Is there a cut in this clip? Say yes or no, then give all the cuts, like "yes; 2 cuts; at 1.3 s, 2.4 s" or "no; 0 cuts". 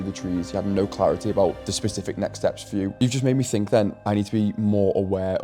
yes; 1 cut; at 2.9 s